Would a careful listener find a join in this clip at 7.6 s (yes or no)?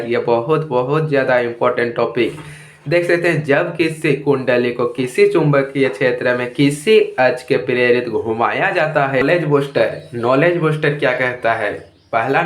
no